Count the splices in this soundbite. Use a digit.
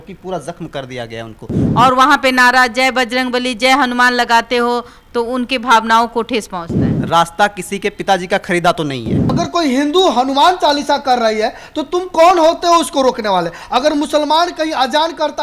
2